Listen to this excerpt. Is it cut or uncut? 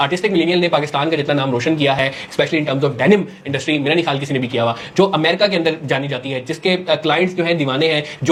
uncut